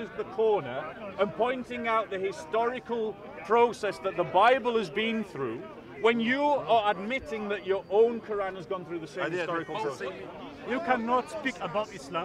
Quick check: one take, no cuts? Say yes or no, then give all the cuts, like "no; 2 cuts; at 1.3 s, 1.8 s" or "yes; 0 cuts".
no; 1 cut; at 10.0 s